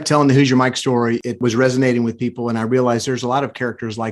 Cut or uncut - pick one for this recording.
cut